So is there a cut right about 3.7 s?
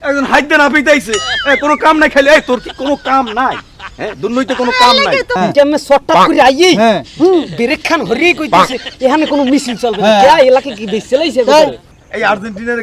no; 2 cuts; at 5.3 s, 11.9 s

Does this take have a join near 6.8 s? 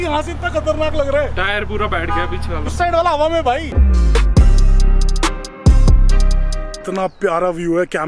yes; 2 cuts; at 3.7 s, 6.8 s

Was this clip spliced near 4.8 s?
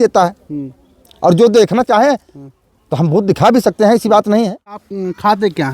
yes; 1 cut; at 4.8 s

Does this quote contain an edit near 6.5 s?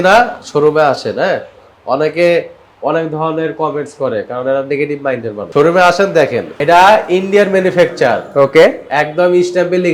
yes; 2 cuts; at 5.4 s, 6.5 s

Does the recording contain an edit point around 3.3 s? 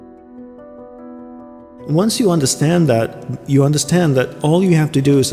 no; 1 cut; at 1.7 s

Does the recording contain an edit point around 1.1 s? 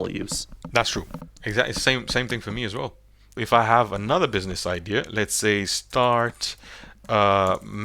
no; 1 cut; at 3.3 s

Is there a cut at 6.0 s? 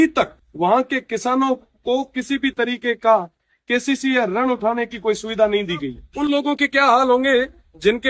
yes; 1 cut; at 6.0 s

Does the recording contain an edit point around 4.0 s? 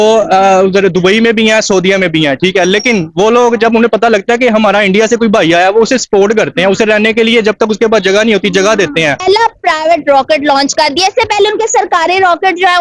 no; 1 cut; at 9.2 s

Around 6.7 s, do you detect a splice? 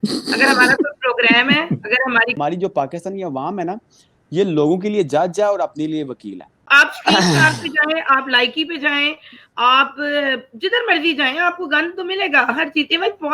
yes; 2 cuts; at 2.3 s, 6.7 s

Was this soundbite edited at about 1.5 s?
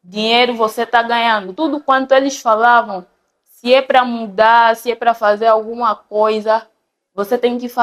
yes; 1 cut; at 1.5 s

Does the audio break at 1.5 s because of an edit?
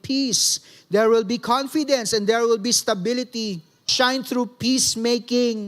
no; 1 cut; at 3.9 s

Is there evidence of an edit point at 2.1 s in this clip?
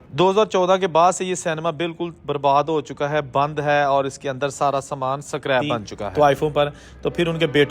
no; 1 cut; at 6.0 s

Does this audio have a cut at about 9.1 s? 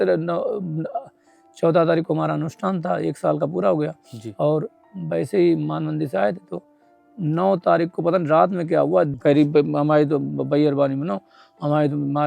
yes; 1 cut; at 9.1 s

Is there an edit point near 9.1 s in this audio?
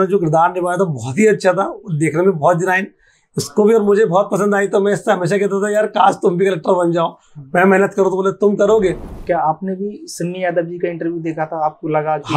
yes; 1 cut; at 9.1 s

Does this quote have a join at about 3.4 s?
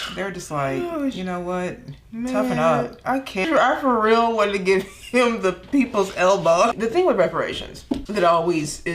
yes; 3 cuts; at 3.4 s, 6.7 s, 8.1 s

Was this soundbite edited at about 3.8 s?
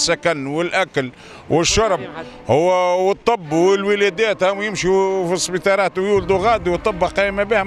no; 0 cuts

